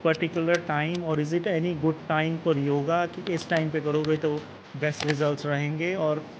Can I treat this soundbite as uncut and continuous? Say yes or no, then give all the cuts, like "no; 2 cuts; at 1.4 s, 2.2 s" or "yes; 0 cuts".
yes; 0 cuts